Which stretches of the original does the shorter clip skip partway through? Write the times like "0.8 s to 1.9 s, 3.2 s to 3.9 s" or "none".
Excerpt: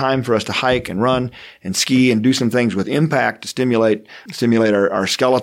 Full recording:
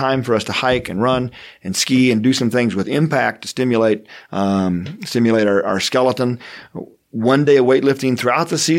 4.2 s to 4.9 s